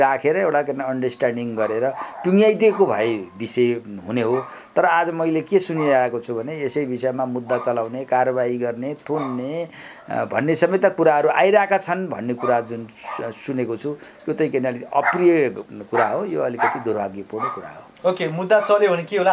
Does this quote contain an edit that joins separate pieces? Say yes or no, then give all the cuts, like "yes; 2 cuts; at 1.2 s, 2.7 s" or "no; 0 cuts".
no; 0 cuts